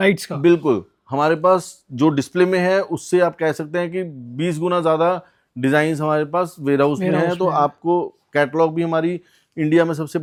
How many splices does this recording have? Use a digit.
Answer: 0